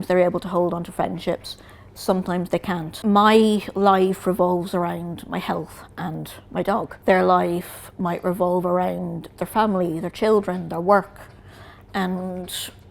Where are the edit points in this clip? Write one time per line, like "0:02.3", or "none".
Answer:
0:02.9
0:06.9